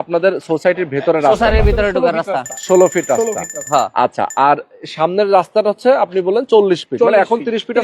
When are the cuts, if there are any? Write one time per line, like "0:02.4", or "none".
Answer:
none